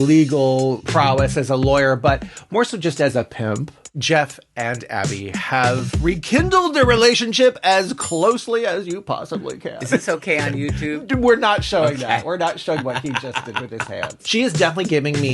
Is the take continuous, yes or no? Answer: no